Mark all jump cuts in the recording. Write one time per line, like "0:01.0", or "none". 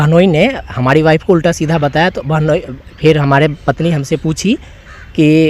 none